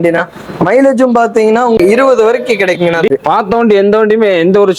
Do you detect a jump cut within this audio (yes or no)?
yes